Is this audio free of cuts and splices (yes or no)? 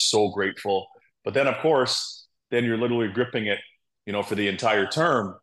yes